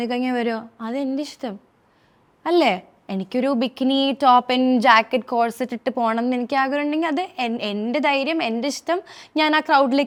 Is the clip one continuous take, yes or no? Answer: yes